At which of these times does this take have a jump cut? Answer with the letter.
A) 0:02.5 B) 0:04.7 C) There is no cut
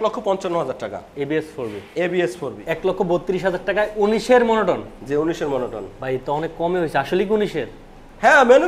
A